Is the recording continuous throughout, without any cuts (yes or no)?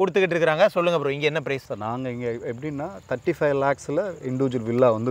yes